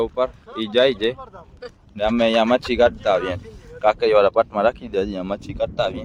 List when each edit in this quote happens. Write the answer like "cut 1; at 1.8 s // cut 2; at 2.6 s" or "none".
none